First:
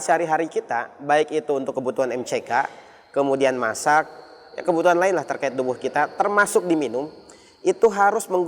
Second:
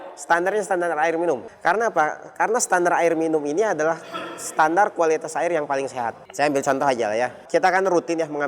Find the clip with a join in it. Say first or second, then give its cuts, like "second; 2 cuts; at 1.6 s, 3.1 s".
second; 3 cuts; at 1.5 s, 6.2 s, 7.4 s